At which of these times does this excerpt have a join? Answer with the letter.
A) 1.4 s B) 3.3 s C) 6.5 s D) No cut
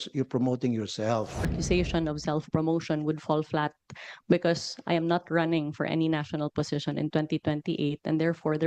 A